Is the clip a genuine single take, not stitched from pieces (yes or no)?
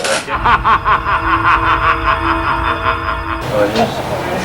yes